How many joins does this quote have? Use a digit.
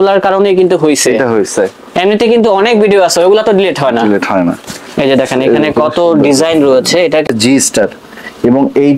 1